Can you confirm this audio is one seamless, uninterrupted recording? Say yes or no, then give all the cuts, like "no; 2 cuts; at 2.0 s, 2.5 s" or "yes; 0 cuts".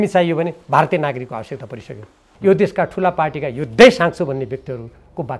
no; 1 cut; at 2.3 s